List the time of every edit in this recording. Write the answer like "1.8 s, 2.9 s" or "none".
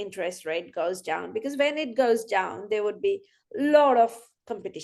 none